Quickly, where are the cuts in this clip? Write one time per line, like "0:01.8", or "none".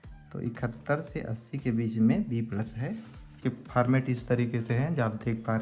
0:03.4

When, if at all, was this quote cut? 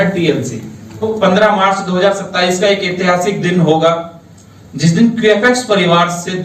0:01.0

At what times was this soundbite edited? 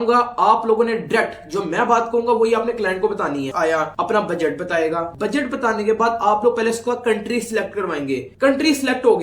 0:03.5

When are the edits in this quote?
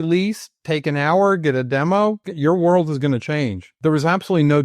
0:02.3
0:03.6

